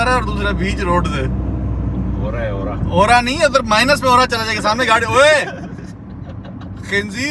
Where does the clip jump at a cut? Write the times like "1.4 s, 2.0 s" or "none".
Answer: none

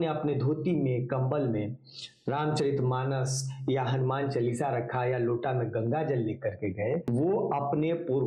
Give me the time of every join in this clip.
7.0 s

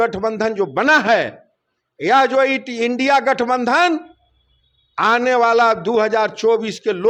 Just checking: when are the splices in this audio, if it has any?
none

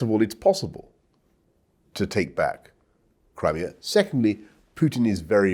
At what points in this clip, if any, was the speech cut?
none

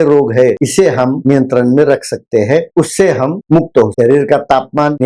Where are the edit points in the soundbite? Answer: none

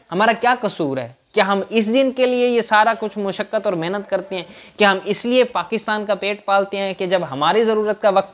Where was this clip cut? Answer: none

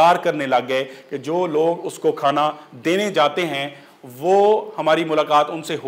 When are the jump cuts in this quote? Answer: none

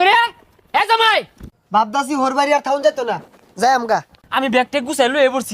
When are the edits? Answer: 1.4 s, 4.2 s

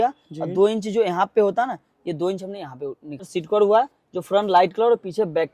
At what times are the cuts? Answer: 3.3 s

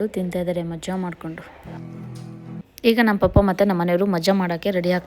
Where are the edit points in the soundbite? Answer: 2.6 s

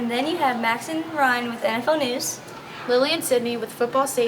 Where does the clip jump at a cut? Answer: 2.3 s

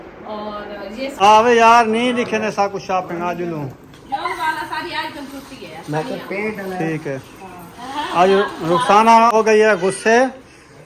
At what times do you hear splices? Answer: 1.2 s, 9.3 s

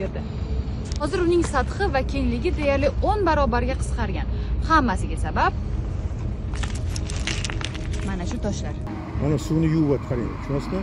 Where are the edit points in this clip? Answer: 8.9 s

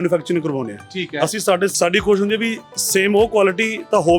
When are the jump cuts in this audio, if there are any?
1.7 s

